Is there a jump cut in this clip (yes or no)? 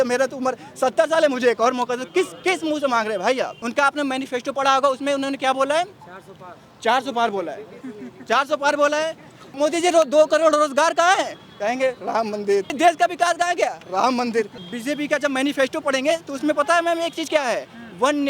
yes